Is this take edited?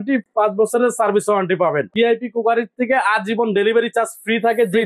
yes; 1 cut; at 1.9 s

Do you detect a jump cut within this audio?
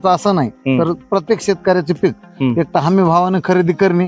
no; 0 cuts

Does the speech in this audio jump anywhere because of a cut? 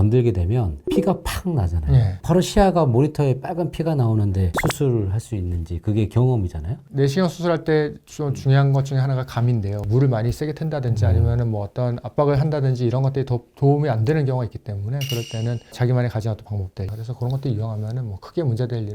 yes; 4 cuts; at 2.2 s, 4.5 s, 9.8 s, 16.9 s

